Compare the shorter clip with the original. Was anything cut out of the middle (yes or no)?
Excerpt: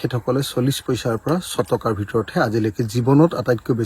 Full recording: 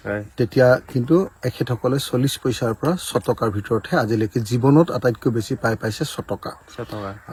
no